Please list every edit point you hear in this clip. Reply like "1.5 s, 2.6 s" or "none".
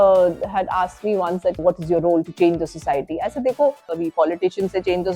1.6 s, 4.0 s